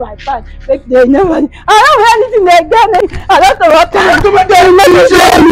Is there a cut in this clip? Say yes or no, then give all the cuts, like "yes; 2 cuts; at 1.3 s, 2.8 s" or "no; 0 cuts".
yes; 1 cut; at 3.0 s